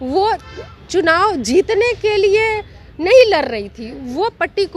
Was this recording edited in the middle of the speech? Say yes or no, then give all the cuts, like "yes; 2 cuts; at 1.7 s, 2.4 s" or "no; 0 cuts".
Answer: no; 0 cuts